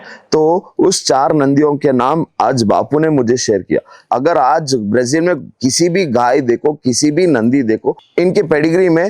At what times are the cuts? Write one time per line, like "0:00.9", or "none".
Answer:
0:04.0
0:08.0